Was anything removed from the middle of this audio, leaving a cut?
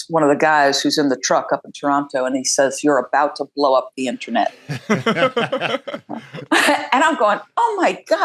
no; 0 cuts

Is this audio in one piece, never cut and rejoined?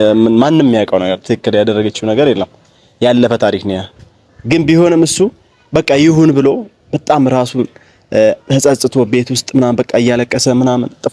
yes; 0 cuts

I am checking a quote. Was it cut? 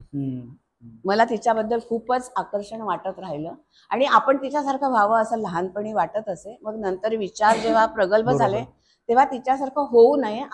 no; 0 cuts

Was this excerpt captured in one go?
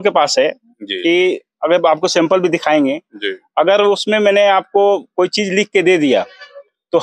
yes; 0 cuts

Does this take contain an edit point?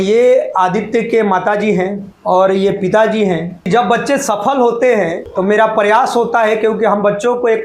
yes; 3 cuts; at 2.1 s, 3.7 s, 5.2 s

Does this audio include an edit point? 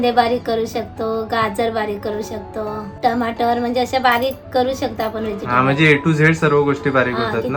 no; 0 cuts

